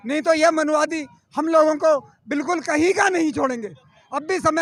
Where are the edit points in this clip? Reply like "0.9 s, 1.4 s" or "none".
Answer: none